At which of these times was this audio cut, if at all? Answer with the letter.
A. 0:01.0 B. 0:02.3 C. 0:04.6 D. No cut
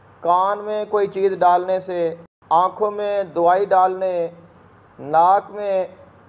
B